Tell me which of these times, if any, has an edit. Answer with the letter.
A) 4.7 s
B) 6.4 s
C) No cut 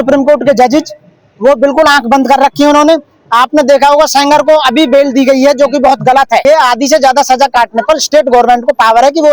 B